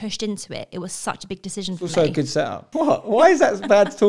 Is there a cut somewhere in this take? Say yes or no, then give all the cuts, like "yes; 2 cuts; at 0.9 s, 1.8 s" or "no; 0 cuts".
yes; 1 cut; at 2.6 s